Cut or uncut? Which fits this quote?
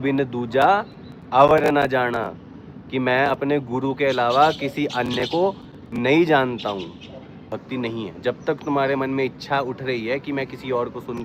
cut